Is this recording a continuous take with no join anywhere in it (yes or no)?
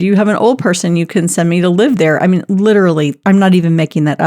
no